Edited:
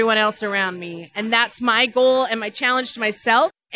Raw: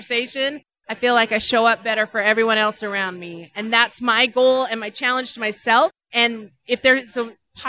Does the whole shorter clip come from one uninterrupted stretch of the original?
yes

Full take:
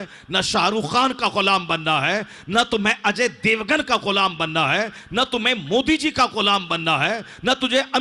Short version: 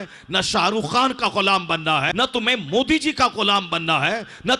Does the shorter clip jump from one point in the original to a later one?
yes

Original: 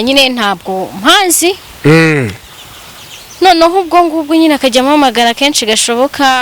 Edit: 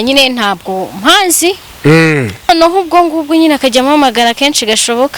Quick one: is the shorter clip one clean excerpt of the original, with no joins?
no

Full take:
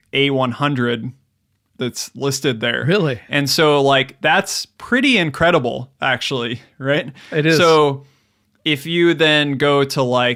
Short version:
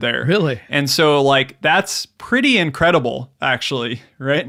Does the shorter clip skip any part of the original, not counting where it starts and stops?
no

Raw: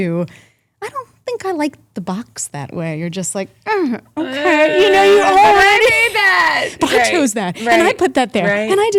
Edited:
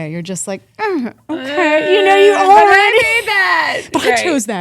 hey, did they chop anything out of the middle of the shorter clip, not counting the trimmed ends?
no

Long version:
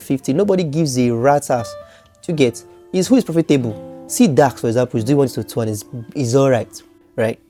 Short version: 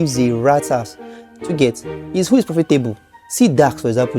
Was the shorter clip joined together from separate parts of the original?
no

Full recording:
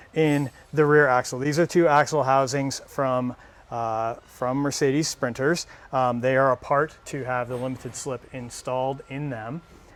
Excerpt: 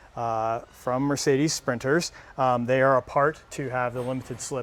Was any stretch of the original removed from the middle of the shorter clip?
no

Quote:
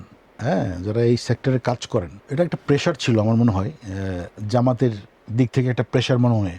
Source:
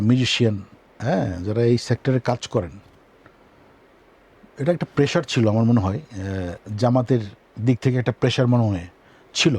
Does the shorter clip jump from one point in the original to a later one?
yes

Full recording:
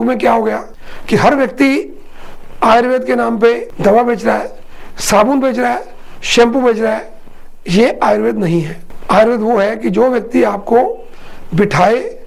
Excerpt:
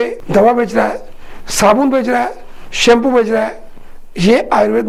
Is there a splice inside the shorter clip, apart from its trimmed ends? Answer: no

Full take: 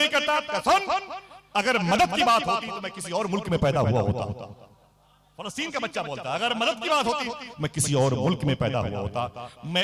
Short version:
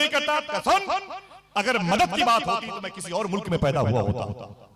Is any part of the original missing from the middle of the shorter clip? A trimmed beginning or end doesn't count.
no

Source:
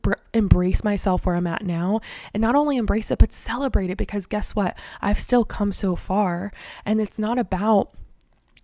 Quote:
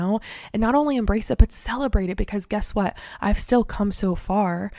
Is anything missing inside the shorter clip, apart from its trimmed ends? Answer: no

